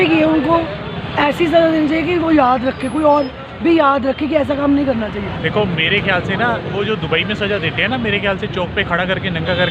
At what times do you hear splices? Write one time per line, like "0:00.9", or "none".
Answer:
0:05.3